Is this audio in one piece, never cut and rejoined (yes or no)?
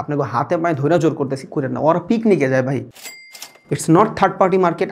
no